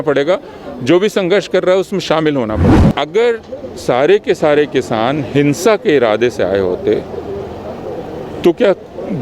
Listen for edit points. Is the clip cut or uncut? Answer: cut